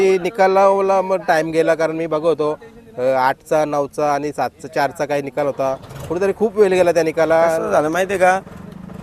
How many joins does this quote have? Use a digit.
0